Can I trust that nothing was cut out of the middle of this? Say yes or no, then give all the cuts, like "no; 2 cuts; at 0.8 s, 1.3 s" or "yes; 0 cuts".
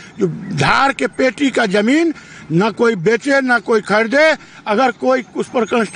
yes; 0 cuts